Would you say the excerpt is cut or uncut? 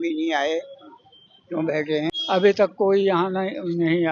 cut